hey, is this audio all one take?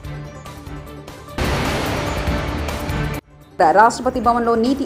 no; 2 cuts; at 1.3 s, 3.3 s

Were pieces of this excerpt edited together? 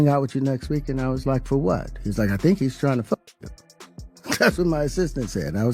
yes; 1 cut; at 3.6 s

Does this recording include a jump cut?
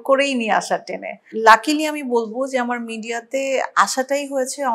yes; 1 cut; at 1.3 s

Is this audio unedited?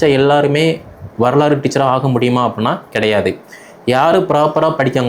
yes; 0 cuts

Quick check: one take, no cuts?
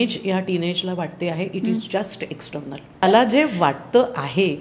no; 1 cut; at 3.0 s

